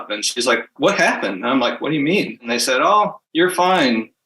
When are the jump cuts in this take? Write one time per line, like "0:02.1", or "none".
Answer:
0:02.9